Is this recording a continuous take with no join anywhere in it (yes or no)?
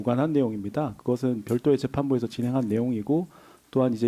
yes